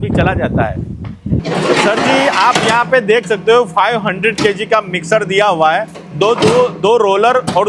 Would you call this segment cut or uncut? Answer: uncut